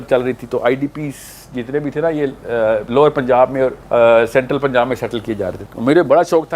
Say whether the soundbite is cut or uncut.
cut